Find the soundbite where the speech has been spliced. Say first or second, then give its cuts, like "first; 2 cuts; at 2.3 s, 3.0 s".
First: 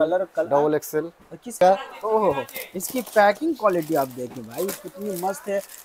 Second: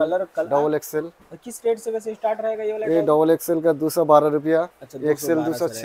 first; 1 cut; at 1.6 s